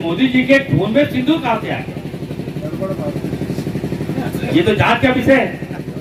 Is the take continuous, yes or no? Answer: yes